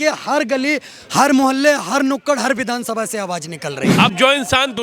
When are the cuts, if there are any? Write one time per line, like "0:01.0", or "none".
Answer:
0:03.9